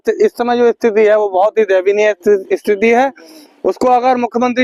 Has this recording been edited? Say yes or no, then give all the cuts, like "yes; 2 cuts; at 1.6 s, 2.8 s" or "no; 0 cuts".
no; 0 cuts